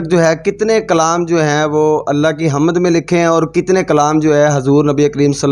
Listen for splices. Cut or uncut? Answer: uncut